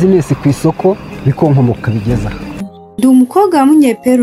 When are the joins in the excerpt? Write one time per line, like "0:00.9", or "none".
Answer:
0:02.7

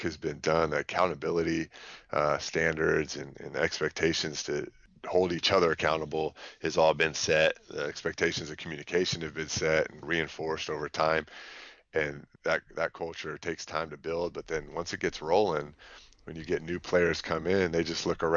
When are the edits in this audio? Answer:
0:04.8
0:10.0
0:12.2

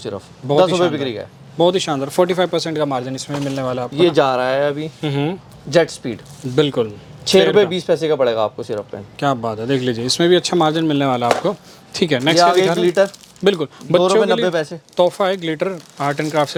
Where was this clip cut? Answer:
none

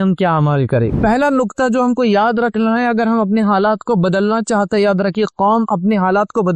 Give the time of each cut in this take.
0:00.9

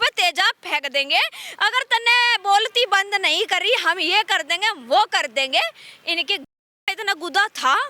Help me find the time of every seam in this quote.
none

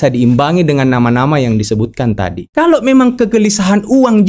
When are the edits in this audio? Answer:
0:02.4

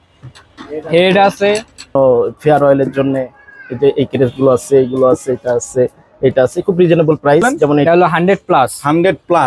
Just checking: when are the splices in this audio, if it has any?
0:01.9
0:07.8

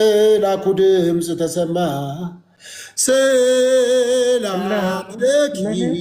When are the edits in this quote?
none

